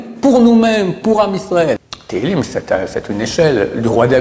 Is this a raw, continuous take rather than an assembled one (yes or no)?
no